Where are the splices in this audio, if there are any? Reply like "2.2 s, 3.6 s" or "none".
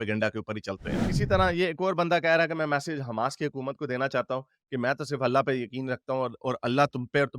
1.0 s